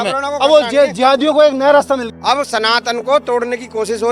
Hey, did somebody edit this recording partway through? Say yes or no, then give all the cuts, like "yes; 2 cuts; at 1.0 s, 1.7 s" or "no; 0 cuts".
yes; 1 cut; at 2.1 s